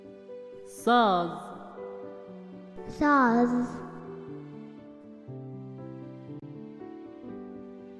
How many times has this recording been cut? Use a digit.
6